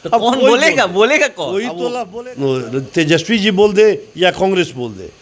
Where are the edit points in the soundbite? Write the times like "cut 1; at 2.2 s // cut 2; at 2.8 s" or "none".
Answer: cut 1; at 1.8 s